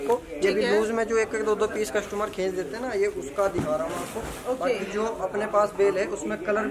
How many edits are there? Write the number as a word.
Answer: zero